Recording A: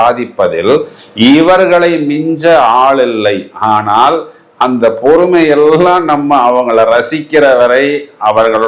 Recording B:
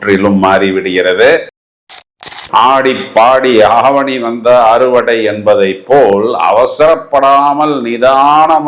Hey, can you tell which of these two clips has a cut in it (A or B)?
B